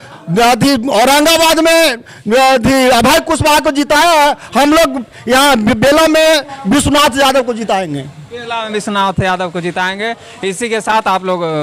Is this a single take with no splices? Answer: yes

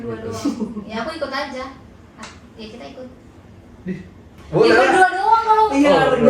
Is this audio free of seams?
no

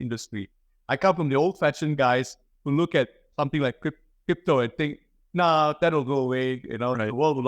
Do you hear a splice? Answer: no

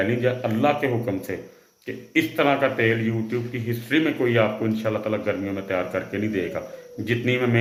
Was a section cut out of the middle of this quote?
no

